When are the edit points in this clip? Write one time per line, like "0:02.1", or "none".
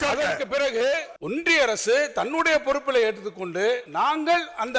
0:01.1
0:03.9

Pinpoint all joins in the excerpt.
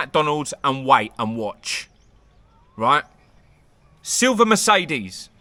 none

